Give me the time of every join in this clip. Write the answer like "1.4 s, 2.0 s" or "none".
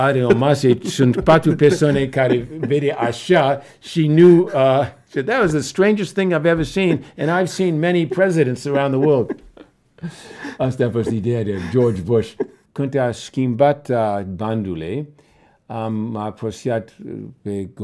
12.6 s